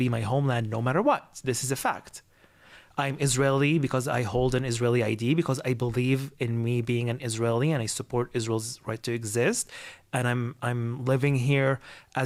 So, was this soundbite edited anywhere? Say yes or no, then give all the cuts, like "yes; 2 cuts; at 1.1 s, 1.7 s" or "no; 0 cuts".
no; 0 cuts